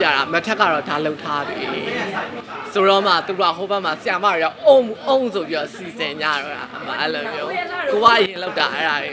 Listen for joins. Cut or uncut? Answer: uncut